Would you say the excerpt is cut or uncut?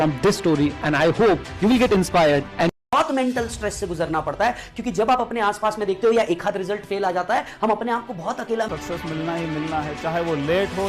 cut